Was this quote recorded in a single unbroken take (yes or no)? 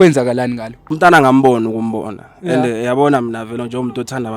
no